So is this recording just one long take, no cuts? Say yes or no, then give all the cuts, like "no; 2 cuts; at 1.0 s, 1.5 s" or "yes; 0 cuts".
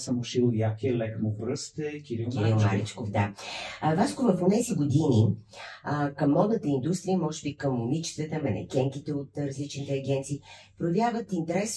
yes; 0 cuts